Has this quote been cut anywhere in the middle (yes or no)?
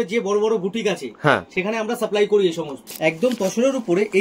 yes